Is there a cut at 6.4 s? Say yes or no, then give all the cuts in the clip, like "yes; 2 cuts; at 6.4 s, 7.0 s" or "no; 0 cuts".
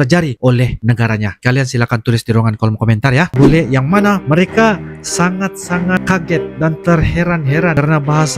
no; 1 cut; at 3.3 s